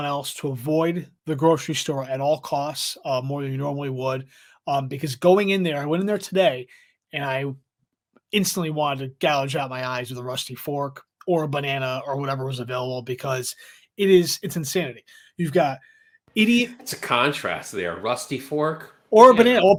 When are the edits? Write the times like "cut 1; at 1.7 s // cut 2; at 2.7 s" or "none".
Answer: none